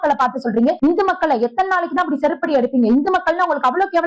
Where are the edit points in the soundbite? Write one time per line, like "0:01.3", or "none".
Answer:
none